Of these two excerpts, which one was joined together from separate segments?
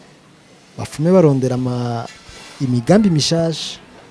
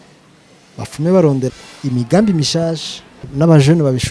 second; 2 cuts; at 1.5 s, 3.2 s

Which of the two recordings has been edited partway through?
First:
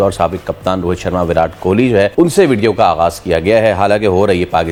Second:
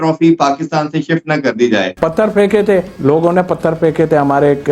second; 1 cut; at 1.9 s

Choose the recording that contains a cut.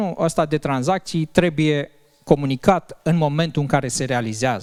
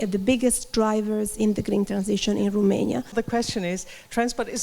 second; 1 cut; at 3.1 s

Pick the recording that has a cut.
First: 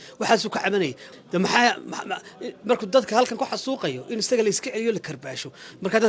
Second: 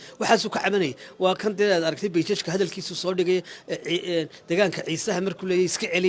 first; 1 cut; at 1.0 s

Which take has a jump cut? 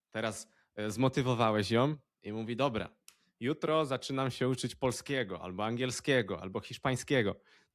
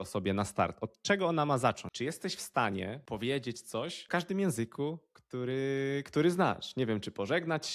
second; 3 cuts; at 1.9 s, 3.0 s, 4.1 s

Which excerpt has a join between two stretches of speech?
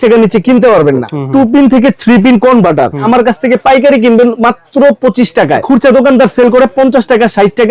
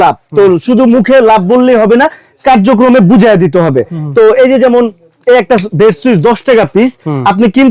first; 3 cuts; at 1.1 s, 3.0 s, 5.6 s

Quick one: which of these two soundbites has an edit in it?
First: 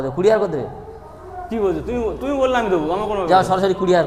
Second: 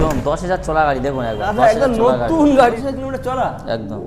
second; 1 cut; at 2.8 s

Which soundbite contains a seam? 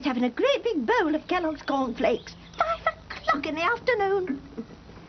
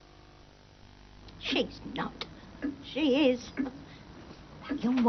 first; 1 cut; at 1.9 s

